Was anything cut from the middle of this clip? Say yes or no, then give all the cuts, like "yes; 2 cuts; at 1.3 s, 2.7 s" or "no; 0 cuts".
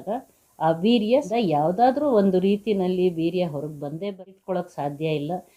yes; 2 cuts; at 1.3 s, 4.0 s